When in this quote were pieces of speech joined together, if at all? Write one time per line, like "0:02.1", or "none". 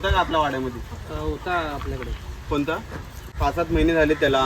0:03.4